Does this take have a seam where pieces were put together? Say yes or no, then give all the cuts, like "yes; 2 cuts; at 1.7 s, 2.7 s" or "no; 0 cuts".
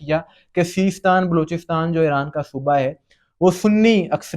no; 0 cuts